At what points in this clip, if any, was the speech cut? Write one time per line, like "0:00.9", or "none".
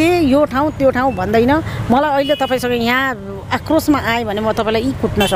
none